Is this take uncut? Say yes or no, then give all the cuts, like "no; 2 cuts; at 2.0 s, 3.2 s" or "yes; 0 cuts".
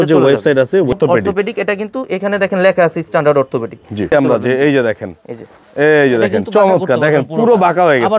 no; 2 cuts; at 0.9 s, 4.1 s